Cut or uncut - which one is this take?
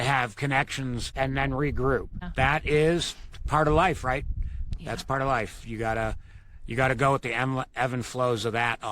cut